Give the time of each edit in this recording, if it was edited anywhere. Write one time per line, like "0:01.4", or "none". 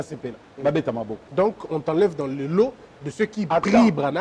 0:01.2